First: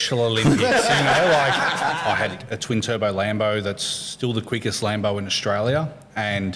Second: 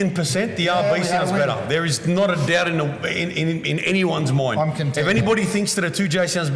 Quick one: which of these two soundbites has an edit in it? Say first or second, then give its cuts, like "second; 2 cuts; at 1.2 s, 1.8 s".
first; 1 cut; at 2.0 s